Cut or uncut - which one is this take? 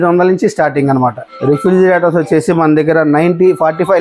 cut